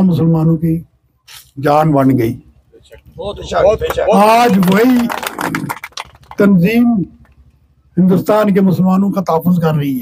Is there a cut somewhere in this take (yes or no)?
no